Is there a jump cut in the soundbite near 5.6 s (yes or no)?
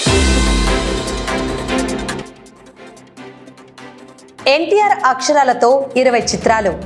no